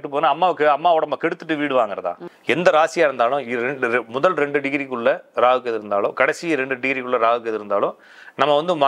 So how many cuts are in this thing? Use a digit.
1